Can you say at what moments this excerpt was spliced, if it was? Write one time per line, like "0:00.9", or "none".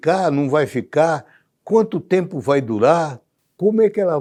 none